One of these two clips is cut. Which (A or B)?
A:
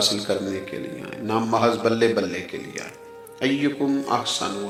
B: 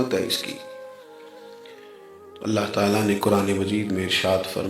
B